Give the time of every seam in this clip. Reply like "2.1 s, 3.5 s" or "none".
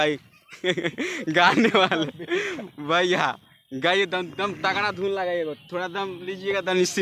none